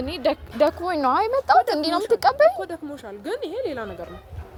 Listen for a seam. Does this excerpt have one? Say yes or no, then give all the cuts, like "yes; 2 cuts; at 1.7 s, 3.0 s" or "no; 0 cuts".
no; 0 cuts